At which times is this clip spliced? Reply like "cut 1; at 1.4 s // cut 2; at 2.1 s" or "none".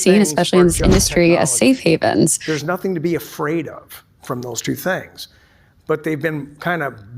cut 1; at 2.4 s